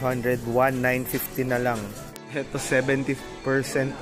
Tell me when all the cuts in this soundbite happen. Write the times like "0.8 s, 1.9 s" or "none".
2.3 s